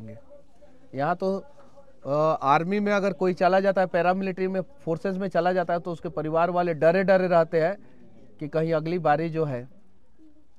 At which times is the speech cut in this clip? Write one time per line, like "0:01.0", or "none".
none